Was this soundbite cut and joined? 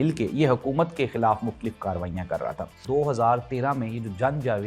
yes; 1 cut; at 2.8 s

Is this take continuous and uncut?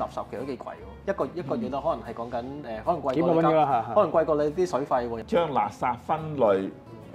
no; 2 cuts; at 0.9 s, 5.2 s

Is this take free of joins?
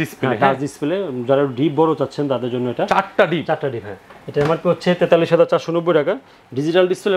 yes; 0 cuts

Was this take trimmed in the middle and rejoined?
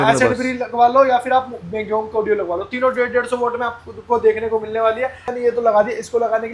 yes; 1 cut; at 5.2 s

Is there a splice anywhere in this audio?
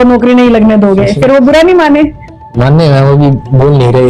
no; 0 cuts

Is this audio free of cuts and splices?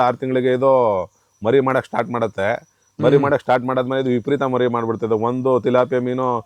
yes; 0 cuts

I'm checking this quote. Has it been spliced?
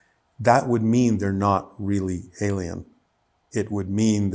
no; 0 cuts

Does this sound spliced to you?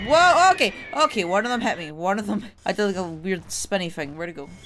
no; 0 cuts

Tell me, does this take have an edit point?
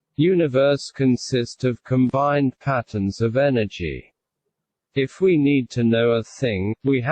no; 0 cuts

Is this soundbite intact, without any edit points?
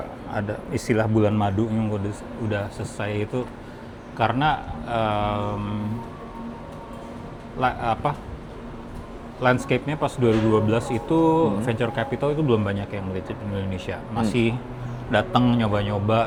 yes; 0 cuts

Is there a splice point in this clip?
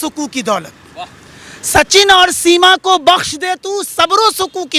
no; 0 cuts

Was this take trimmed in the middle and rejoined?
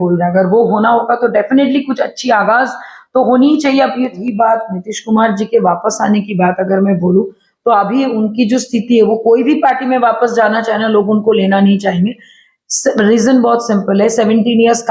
yes; 1 cut; at 4.2 s

